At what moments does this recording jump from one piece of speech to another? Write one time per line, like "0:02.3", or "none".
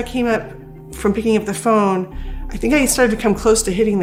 none